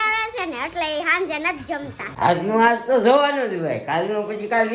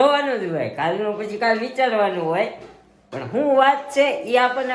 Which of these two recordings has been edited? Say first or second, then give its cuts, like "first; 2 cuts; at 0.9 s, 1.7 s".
first; 1 cut; at 2.0 s